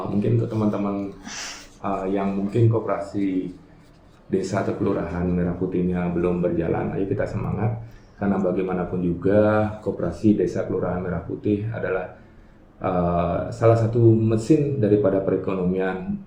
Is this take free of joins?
yes; 0 cuts

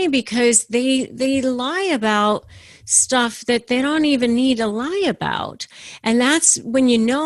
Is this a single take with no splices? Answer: yes; 0 cuts

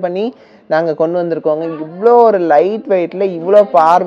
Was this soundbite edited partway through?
no; 0 cuts

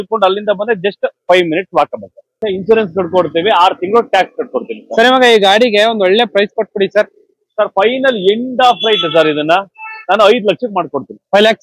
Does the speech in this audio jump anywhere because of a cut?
yes; 1 cut; at 2.4 s

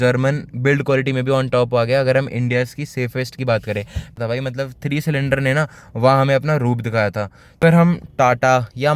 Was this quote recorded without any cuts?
no; 2 cuts; at 4.1 s, 7.6 s

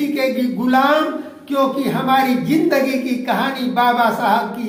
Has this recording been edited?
no; 0 cuts

